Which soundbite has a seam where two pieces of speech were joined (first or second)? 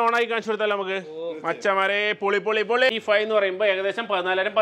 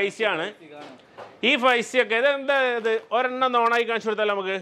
first